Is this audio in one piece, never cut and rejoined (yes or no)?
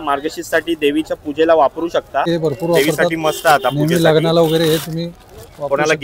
no